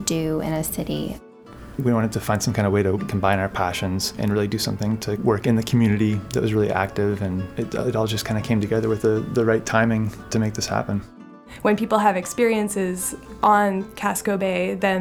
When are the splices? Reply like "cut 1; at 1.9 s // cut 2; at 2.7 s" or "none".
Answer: cut 1; at 1.2 s // cut 2; at 3.1 s // cut 3; at 4.1 s // cut 4; at 5.2 s // cut 5; at 6.2 s // cut 6; at 7.5 s // cut 7; at 10.2 s // cut 8; at 11.5 s